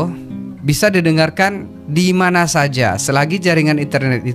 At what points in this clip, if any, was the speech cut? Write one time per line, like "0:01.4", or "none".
none